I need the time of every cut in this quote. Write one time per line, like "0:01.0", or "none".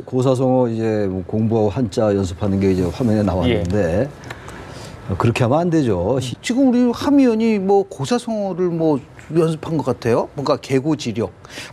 0:06.3